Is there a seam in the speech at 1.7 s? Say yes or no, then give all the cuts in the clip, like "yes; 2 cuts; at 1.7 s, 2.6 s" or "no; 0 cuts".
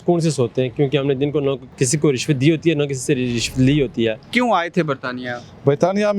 yes; 2 cuts; at 1.7 s, 4.2 s